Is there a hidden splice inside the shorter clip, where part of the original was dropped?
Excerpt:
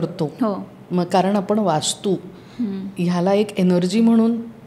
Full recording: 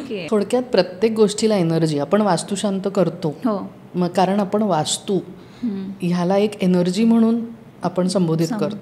no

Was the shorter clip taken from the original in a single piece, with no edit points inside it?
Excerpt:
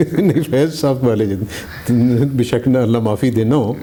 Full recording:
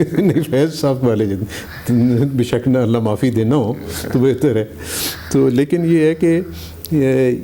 yes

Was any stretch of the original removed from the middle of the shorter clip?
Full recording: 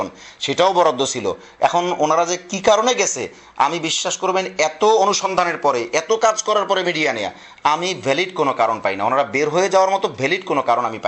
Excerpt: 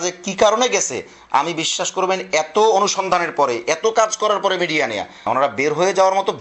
yes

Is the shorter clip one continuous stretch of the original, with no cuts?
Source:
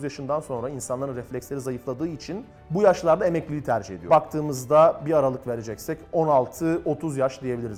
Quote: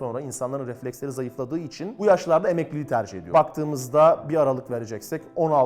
no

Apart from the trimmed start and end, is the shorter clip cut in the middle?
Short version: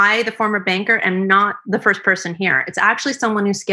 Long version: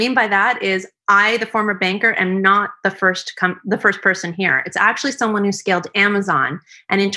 yes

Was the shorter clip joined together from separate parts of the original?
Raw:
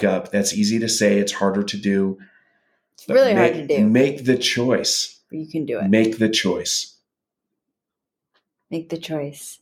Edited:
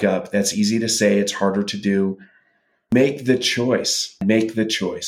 yes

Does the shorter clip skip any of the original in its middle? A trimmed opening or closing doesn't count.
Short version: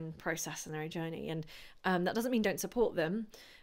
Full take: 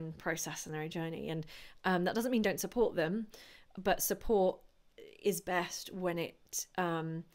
no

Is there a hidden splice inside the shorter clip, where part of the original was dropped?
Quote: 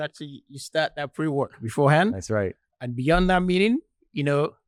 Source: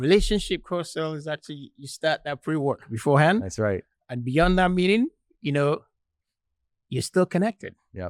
no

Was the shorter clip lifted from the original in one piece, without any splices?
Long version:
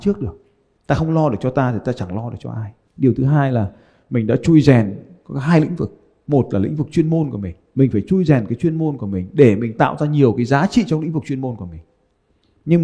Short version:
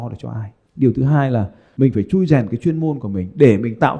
no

